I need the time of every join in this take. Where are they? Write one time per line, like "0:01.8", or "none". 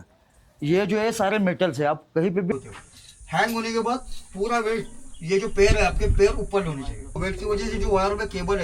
0:02.5
0:07.2